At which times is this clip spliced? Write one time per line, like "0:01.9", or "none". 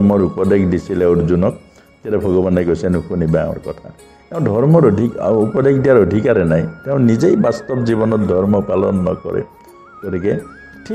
none